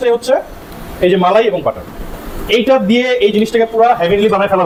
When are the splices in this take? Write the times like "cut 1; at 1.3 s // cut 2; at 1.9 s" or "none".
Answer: none